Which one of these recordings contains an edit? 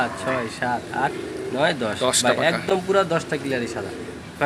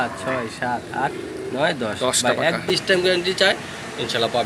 second; 1 cut; at 2.7 s

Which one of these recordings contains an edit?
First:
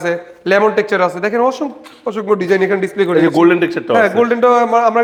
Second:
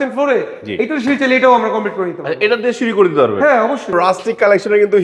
second; 1 cut; at 3.9 s

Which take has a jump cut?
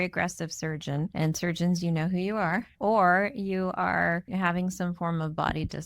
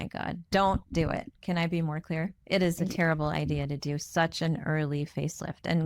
first; 3 cuts; at 1.1 s, 2.7 s, 4.3 s

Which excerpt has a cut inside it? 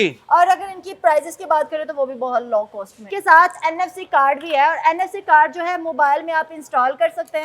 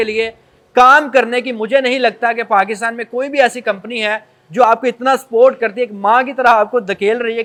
first; 1 cut; at 3.0 s

